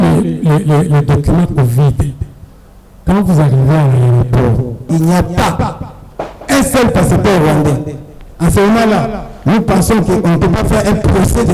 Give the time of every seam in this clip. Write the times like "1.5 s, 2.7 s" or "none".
4.8 s

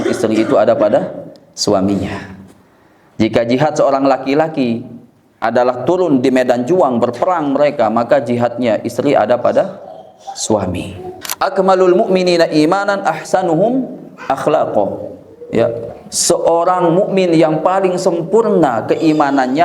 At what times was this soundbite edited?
11.2 s

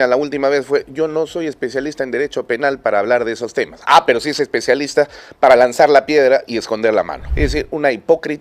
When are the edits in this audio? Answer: 7.2 s

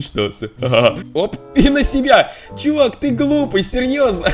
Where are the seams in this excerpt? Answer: 1.0 s

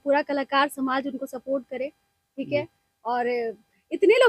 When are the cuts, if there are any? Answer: none

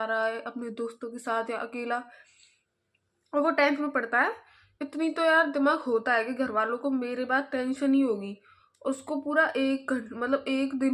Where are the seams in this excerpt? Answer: none

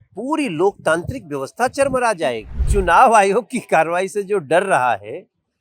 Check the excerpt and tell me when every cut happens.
2.7 s

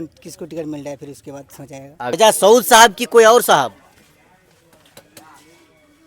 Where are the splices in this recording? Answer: 2.1 s

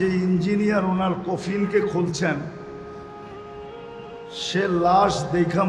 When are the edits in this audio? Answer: none

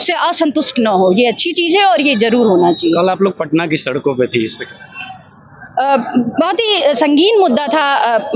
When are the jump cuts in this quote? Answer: none

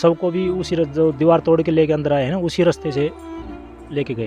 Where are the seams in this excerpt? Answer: none

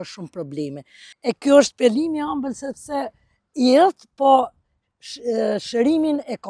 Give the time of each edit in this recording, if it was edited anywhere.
1.1 s

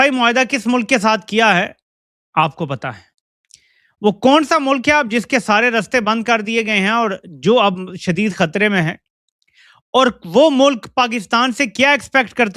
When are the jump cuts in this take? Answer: none

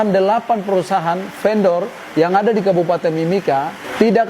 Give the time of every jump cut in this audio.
none

